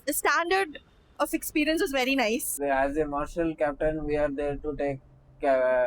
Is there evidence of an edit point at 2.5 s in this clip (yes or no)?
yes